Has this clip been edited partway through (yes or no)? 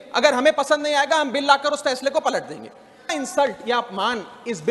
yes